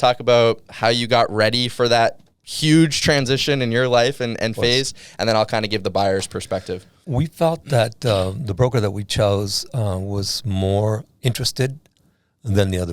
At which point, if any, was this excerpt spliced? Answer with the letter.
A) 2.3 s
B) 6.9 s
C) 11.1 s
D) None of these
B